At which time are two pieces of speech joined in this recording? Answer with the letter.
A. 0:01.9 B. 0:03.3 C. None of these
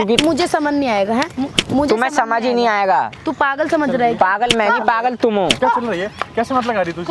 C